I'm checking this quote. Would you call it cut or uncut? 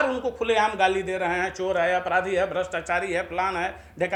uncut